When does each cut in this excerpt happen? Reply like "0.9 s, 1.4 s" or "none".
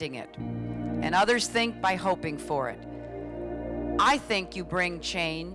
1.8 s